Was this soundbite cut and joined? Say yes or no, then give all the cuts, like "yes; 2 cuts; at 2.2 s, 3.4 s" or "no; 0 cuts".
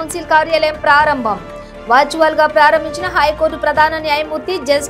no; 0 cuts